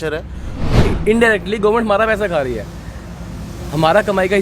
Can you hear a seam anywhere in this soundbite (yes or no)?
yes